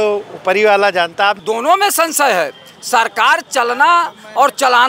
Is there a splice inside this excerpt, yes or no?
yes